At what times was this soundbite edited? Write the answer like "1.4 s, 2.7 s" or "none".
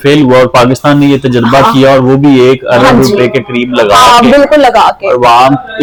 none